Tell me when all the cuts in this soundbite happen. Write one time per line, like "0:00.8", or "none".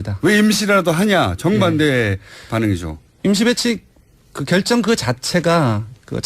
0:03.7